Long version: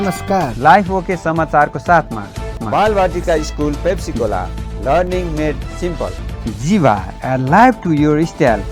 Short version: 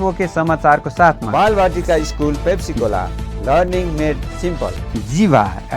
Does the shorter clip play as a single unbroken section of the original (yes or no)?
no